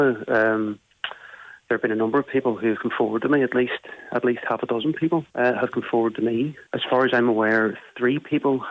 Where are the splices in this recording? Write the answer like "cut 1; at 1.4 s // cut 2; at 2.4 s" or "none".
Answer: cut 1; at 5.3 s // cut 2; at 6.6 s